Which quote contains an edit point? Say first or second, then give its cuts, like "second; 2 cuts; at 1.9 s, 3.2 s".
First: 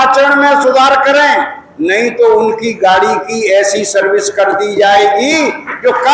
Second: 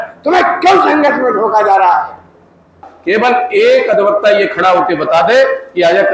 second; 1 cut; at 2.9 s